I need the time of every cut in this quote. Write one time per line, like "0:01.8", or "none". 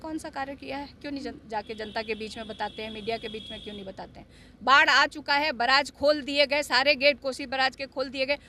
none